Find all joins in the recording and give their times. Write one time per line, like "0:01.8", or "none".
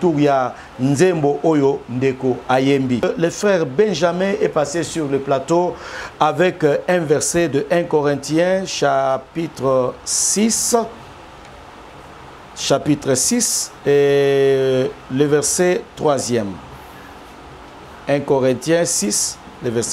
0:03.0